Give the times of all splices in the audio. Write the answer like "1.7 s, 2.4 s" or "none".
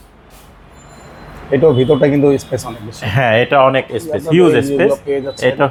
none

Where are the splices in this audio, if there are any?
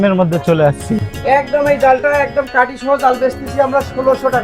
1.0 s

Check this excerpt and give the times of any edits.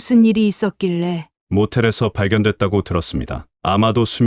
1.3 s

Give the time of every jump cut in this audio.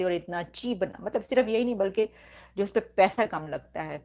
none

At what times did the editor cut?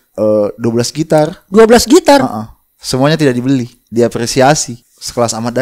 3.8 s, 4.7 s

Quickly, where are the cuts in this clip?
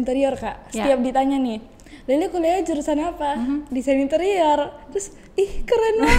none

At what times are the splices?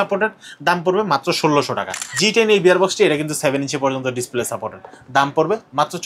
1.9 s

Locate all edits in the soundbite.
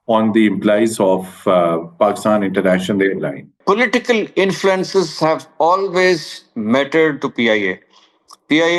3.5 s

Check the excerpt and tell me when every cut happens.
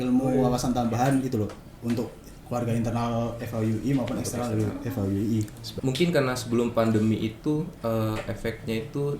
5.6 s

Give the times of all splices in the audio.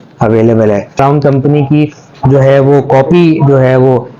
0.9 s

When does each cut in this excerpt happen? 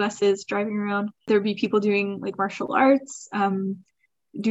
1.3 s

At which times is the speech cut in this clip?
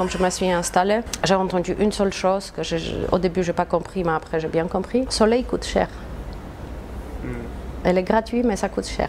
1.1 s, 5.1 s

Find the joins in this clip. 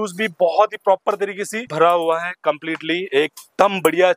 1.7 s

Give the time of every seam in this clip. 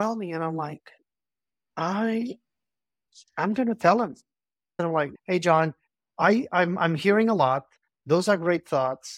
4.9 s

